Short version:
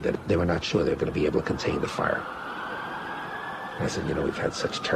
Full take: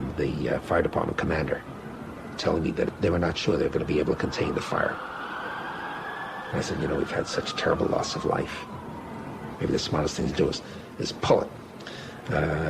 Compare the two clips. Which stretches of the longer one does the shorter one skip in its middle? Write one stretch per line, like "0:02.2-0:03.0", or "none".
none